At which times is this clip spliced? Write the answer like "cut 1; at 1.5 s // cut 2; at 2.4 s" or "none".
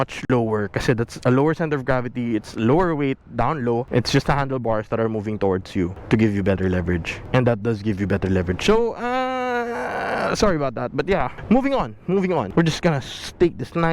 cut 1; at 12.5 s